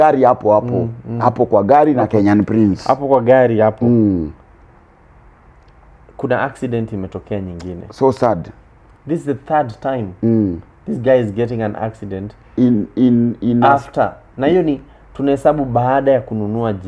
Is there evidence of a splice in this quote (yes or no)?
no